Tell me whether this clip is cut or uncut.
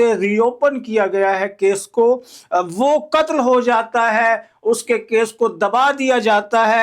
cut